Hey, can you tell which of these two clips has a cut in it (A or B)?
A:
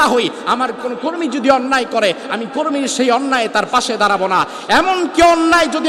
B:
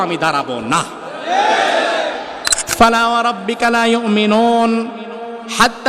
B